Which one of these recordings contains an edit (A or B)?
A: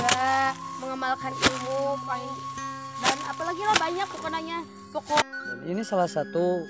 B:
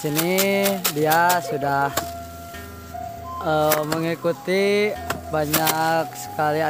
A